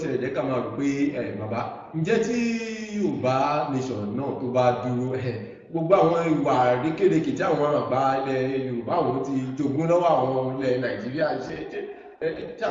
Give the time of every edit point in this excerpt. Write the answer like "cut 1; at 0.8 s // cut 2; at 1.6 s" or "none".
none